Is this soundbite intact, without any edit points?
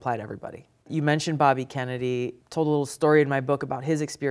no; 2 cuts; at 0.9 s, 2.4 s

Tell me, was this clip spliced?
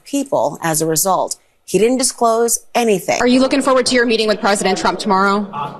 yes; 1 cut; at 3.2 s

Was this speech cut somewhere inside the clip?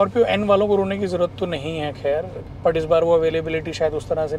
yes; 1 cut; at 2.4 s

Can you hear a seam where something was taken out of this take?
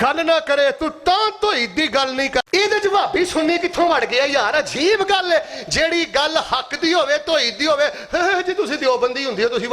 yes; 1 cut; at 2.4 s

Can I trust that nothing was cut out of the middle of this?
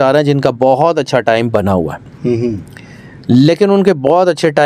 yes; 0 cuts

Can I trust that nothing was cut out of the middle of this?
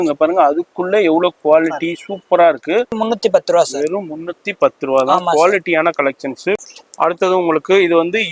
no; 2 cuts; at 3.0 s, 6.6 s

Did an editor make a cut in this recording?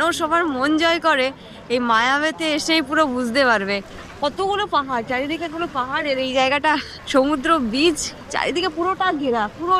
no; 0 cuts

